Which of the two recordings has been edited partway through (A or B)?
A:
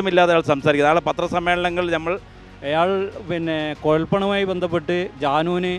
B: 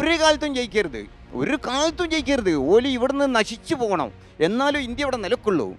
A